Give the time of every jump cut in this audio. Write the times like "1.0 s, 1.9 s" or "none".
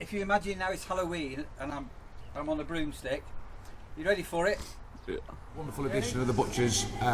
5.7 s